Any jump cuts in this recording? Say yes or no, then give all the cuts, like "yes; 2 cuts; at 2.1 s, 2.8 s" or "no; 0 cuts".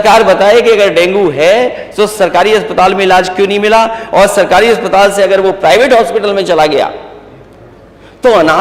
no; 0 cuts